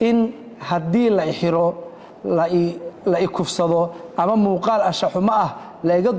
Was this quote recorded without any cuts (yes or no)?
no